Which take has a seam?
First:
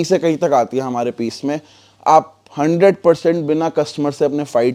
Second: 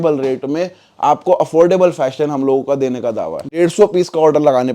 second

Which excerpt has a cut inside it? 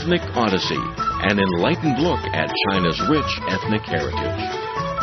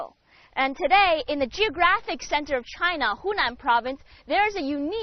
first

